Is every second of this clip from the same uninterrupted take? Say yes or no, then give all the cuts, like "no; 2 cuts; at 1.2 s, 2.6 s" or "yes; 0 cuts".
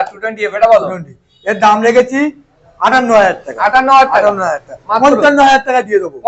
yes; 0 cuts